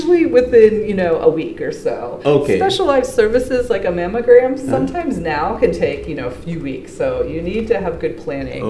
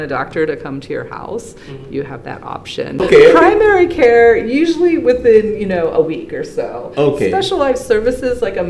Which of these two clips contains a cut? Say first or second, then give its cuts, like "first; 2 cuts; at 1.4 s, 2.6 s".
second; 1 cut; at 3.1 s